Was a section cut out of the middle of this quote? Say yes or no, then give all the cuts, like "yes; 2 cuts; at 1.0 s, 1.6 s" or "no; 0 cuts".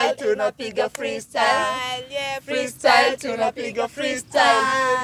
no; 0 cuts